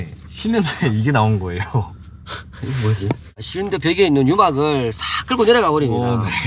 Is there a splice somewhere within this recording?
yes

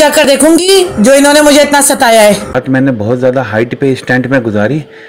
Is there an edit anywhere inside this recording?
yes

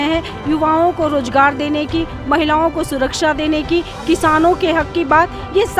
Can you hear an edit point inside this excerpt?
no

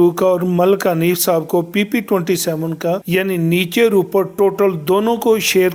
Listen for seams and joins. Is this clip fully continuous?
yes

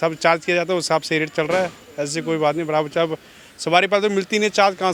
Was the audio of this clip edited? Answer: no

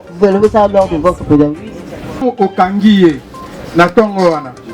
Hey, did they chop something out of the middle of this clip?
yes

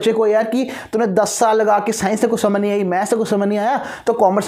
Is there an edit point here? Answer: no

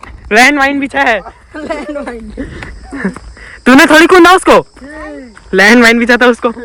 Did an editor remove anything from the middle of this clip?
no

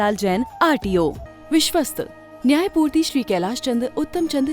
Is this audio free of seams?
no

